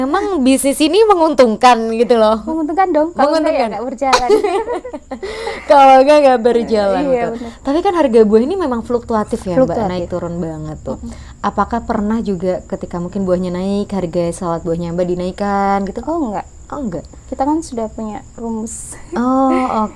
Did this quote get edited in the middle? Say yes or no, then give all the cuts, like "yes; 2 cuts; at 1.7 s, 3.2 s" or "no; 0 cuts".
no; 0 cuts